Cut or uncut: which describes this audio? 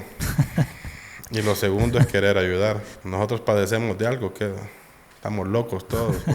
cut